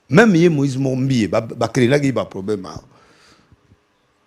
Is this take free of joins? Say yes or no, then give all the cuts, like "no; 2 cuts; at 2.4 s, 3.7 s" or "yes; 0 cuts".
yes; 0 cuts